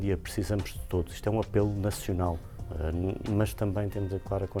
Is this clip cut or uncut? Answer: uncut